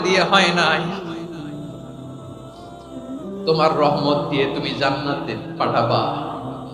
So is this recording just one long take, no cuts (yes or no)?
yes